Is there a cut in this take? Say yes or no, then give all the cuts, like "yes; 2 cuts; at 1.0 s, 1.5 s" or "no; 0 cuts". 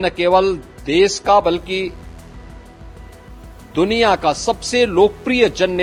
no; 0 cuts